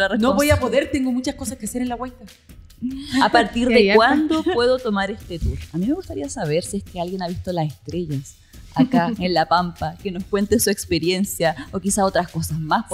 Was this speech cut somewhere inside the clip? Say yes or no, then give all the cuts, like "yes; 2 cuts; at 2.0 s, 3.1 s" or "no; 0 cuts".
yes; 1 cut; at 5.6 s